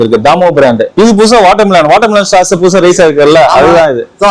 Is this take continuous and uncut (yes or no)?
no